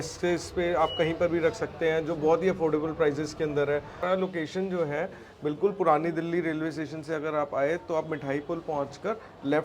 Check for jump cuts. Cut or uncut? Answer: cut